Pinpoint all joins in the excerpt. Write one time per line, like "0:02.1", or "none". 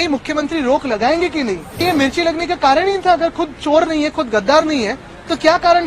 0:01.8